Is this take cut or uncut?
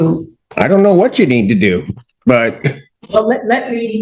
cut